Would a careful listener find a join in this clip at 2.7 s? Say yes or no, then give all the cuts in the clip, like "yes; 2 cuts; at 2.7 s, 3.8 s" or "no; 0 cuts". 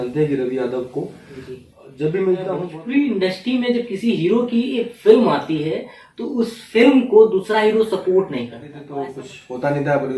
yes; 2 cuts; at 2.7 s, 8.8 s